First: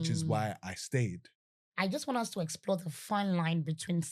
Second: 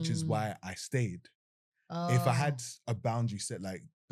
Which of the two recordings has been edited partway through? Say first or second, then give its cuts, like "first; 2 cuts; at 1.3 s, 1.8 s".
first; 1 cut; at 1.7 s